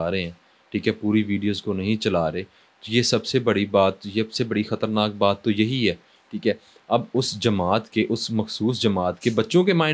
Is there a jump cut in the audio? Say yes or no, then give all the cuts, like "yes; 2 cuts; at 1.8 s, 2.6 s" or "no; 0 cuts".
no; 0 cuts